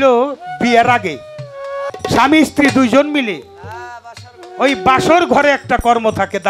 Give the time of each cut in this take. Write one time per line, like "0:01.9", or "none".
0:01.9